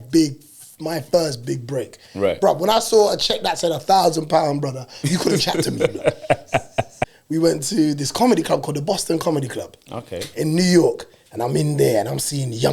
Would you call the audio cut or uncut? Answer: cut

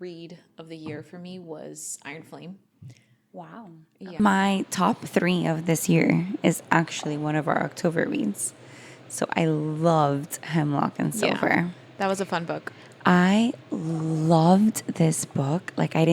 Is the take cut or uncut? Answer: cut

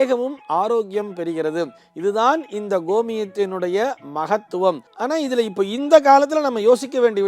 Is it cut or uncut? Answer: uncut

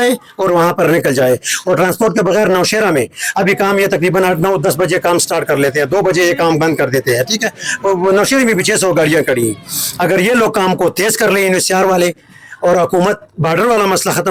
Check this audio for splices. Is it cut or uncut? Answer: uncut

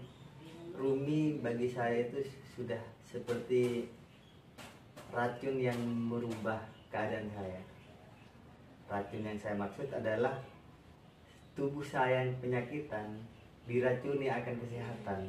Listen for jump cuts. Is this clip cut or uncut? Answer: uncut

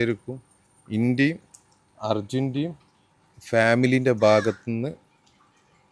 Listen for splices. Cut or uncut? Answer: uncut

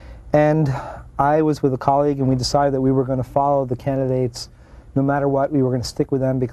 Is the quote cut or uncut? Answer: uncut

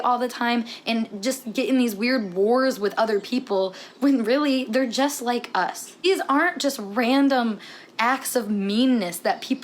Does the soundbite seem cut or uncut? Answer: cut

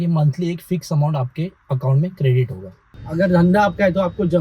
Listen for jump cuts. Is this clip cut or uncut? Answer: cut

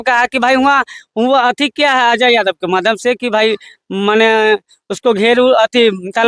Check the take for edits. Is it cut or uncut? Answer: uncut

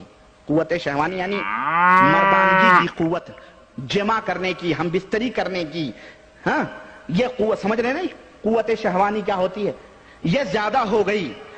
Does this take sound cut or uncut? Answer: uncut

